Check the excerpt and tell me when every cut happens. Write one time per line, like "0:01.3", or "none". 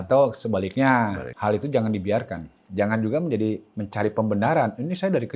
0:01.3
0:02.6